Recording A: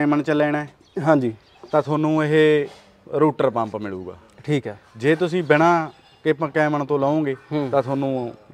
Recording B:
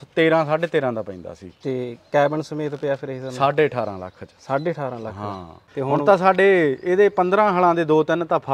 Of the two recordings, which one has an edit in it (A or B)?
B